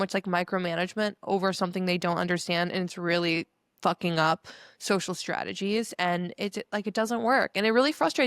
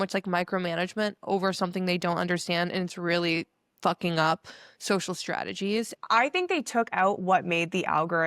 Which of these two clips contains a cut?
second; 1 cut; at 5.9 s

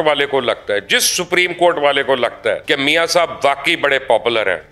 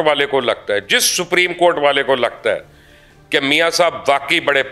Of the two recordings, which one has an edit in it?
first; 1 cut; at 2.6 s

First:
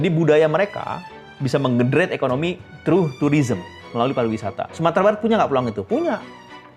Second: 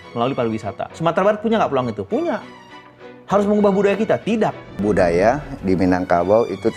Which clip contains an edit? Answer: second; 1 cut; at 4.8 s

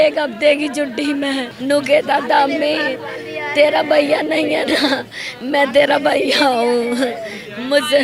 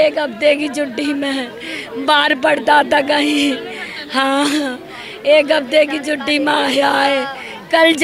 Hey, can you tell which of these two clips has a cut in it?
first; 1 cut; at 1.5 s

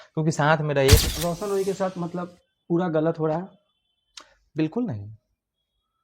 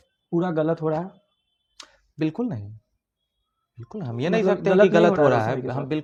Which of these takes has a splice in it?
first; 1 cut; at 1.0 s

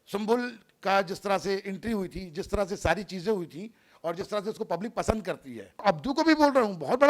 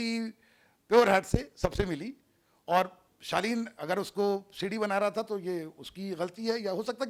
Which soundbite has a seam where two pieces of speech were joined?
first; 1 cut; at 5.8 s

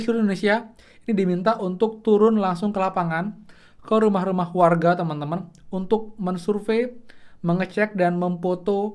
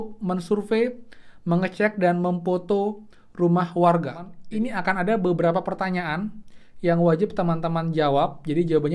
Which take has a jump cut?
second; 1 cut; at 4.3 s

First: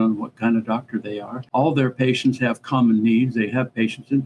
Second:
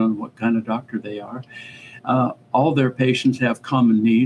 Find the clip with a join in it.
first; 1 cut; at 1.4 s

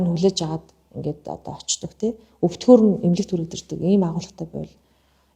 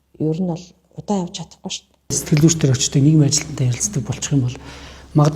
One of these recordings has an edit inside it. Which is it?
second; 1 cut; at 2.2 s

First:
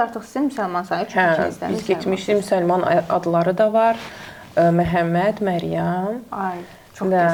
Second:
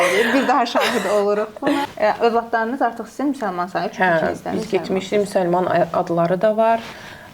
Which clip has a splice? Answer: second; 1 cut; at 1.9 s

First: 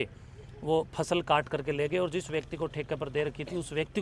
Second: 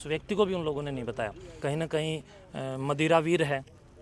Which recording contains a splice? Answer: second; 1 cut; at 1.6 s

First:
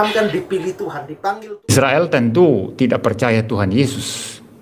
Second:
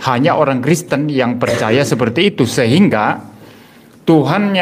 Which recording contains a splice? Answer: first; 1 cut; at 1.7 s

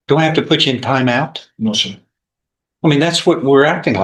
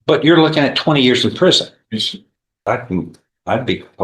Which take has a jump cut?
second; 1 cut; at 2.7 s

